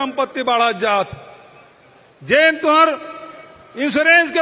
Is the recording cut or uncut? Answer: uncut